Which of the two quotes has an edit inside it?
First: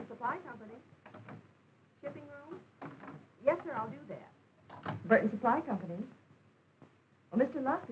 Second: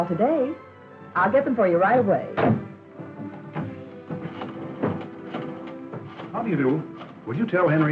first; 1 cut; at 1.8 s

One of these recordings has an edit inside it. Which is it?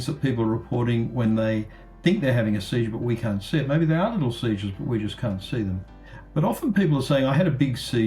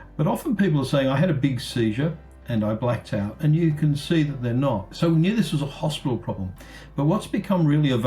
second; 1 cut; at 4.9 s

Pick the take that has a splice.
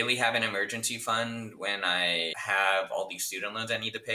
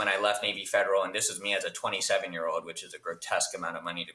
first; 1 cut; at 2.4 s

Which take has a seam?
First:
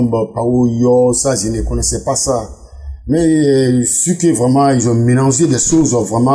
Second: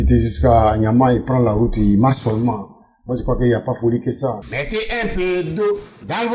second; 1 cut; at 4.5 s

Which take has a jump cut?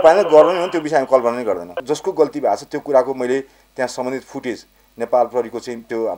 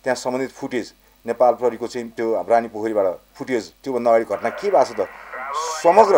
first; 1 cut; at 1.8 s

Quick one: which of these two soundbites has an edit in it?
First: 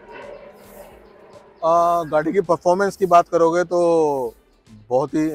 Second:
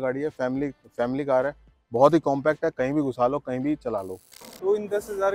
second; 1 cut; at 4.2 s

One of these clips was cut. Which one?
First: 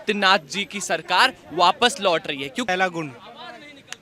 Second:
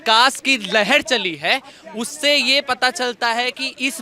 first; 1 cut; at 2.7 s

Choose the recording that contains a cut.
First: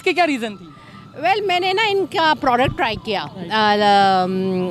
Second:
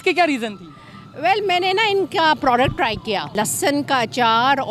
second; 1 cut; at 3.3 s

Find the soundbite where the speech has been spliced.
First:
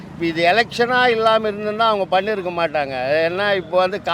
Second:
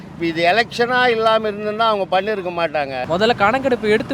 second; 1 cut; at 3.0 s

